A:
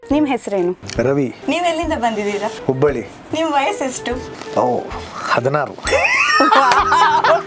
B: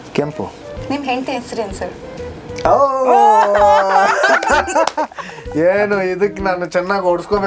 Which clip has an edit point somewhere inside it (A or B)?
A